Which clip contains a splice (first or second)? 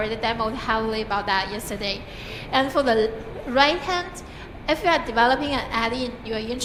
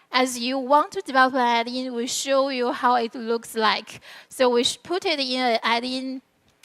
second